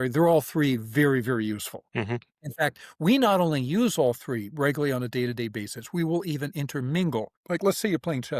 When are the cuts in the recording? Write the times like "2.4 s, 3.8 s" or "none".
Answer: 1.8 s, 7.4 s